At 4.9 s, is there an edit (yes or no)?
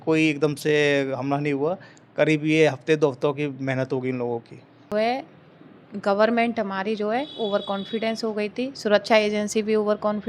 yes